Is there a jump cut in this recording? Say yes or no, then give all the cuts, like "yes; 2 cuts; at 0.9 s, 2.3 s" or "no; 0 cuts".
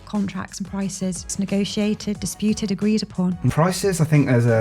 yes; 2 cuts; at 1.3 s, 3.5 s